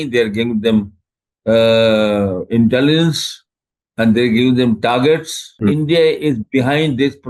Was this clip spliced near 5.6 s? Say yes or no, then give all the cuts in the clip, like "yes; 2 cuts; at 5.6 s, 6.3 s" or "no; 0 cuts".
yes; 1 cut; at 5.6 s